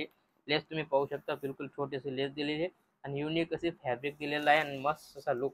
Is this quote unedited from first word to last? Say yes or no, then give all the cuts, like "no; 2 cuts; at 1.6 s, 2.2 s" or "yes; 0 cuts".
yes; 0 cuts